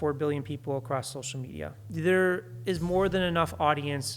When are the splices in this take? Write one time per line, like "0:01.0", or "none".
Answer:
0:01.8